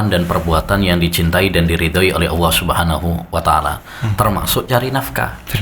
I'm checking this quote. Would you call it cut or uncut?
uncut